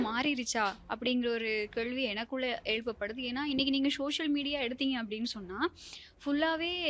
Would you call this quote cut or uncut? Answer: uncut